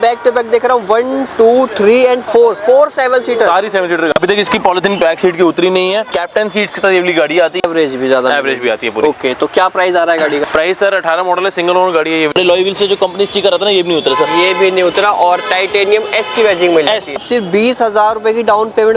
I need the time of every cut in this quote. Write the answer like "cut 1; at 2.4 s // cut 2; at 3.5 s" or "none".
cut 1; at 4.1 s // cut 2; at 6.2 s // cut 3; at 7.6 s // cut 4; at 10.4 s // cut 5; at 12.3 s // cut 6; at 17.2 s